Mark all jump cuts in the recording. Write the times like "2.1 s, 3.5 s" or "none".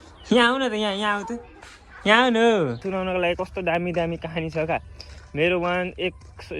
2.8 s